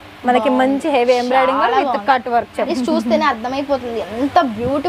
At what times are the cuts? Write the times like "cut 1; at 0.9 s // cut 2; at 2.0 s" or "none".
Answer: cut 1; at 2.7 s